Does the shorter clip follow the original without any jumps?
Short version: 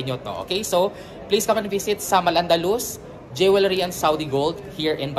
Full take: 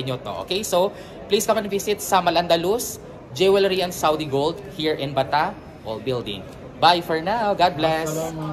yes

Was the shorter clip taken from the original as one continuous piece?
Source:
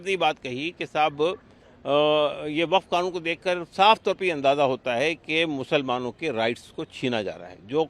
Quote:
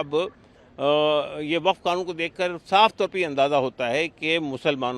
yes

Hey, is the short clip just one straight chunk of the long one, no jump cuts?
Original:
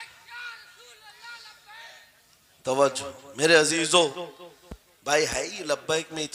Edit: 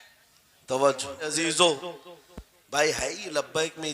no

